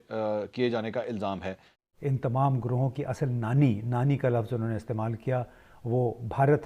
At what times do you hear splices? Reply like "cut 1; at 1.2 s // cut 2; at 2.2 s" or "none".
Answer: cut 1; at 1.7 s